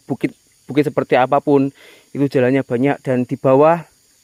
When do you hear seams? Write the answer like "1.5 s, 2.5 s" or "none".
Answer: none